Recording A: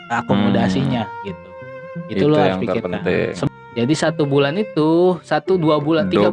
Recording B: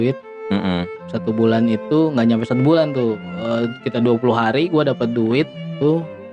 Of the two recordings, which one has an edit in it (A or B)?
A